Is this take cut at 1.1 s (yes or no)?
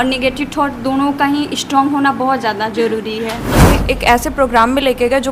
no